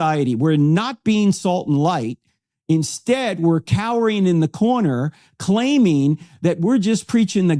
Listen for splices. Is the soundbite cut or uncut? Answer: uncut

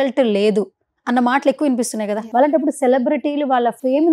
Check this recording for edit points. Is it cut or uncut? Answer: cut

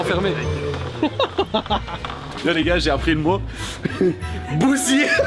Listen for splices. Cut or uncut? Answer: cut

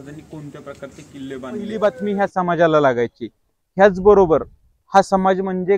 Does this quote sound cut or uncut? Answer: cut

